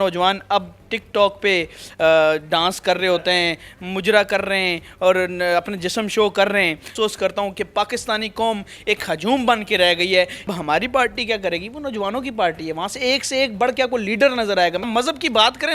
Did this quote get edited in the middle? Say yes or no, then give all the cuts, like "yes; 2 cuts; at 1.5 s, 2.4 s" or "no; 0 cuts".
yes; 3 cuts; at 6.9 s, 10.5 s, 14.9 s